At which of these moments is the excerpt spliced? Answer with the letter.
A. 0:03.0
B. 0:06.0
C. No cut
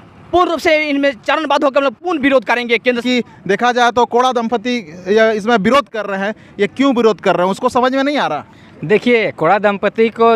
A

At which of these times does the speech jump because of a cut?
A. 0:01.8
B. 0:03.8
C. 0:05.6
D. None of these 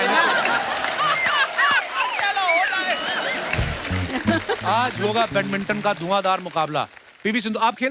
B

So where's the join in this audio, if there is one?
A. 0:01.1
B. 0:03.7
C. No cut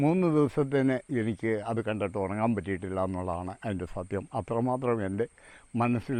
C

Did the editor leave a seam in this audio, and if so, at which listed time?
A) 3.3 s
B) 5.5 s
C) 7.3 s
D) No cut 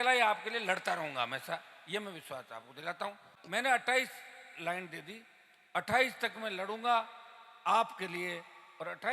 A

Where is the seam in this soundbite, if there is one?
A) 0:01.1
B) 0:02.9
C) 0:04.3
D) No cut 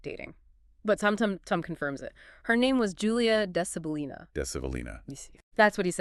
D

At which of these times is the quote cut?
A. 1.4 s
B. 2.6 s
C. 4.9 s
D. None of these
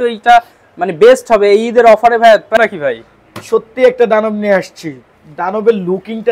B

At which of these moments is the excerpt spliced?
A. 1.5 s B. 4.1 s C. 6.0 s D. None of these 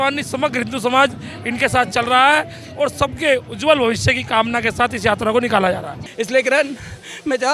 C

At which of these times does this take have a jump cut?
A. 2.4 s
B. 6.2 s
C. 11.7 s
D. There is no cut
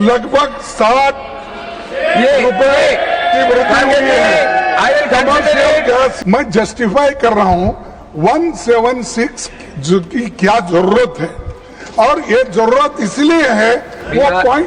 B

